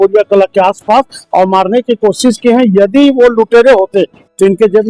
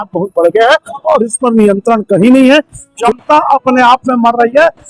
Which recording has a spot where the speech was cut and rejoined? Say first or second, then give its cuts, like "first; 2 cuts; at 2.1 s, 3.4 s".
second; 1 cut; at 3.0 s